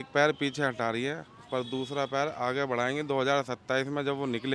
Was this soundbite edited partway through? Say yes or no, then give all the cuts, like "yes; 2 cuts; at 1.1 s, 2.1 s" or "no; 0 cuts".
no; 0 cuts